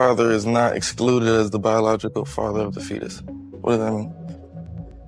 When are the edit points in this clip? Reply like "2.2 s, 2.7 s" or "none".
4.0 s